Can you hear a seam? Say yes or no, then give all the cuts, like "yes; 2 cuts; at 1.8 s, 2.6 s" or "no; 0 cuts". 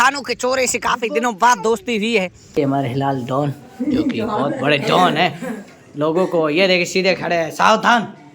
yes; 1 cut; at 2.6 s